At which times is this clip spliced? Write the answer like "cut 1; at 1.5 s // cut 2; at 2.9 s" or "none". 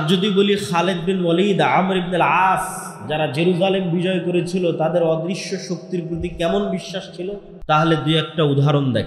cut 1; at 7.5 s